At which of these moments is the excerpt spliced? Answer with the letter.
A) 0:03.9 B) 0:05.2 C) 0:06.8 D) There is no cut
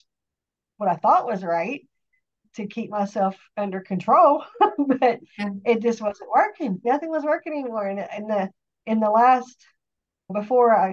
C